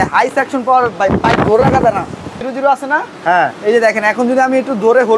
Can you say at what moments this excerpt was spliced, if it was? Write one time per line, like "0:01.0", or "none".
0:02.4